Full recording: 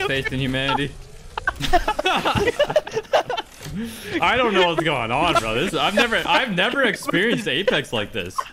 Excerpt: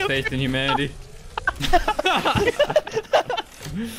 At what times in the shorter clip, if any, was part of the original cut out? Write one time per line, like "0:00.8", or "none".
none